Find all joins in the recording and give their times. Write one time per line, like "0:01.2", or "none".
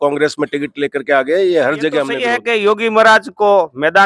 0:02.3